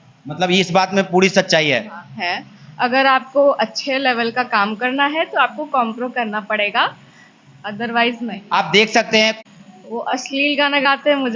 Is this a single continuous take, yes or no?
no